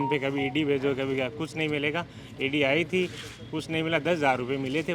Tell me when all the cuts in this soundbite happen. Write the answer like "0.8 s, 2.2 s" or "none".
none